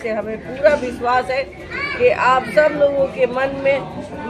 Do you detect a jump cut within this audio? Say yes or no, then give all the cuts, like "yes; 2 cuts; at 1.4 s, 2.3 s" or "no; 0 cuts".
no; 0 cuts